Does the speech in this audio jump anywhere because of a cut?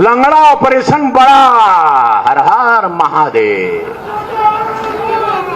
no; 0 cuts

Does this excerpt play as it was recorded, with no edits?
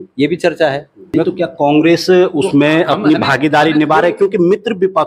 no; 1 cut; at 0.9 s

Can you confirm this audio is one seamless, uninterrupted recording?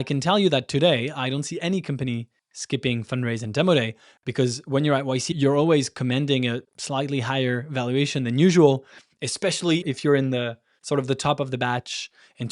no; 2 cuts; at 5.3 s, 9.8 s

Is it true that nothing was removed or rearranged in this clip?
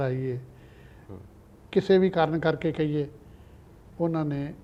yes; 0 cuts

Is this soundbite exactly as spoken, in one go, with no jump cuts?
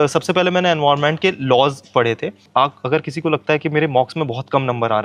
no; 1 cut; at 2.4 s

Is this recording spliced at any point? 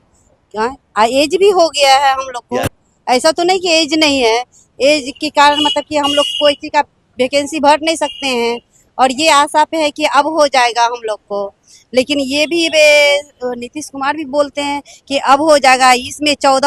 no; 0 cuts

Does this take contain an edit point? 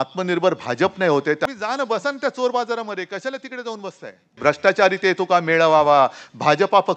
yes; 2 cuts; at 1.5 s, 4.4 s

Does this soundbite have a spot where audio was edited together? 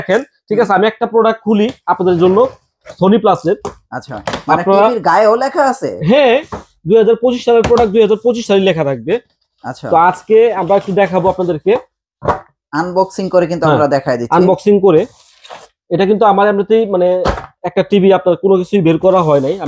no; 0 cuts

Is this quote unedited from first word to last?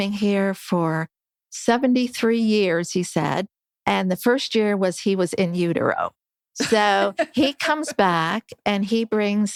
yes; 0 cuts

